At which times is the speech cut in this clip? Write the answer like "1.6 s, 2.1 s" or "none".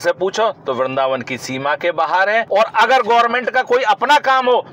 none